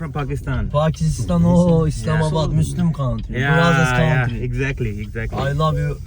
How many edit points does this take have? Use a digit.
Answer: 0